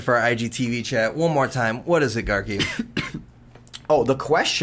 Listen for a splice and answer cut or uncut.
uncut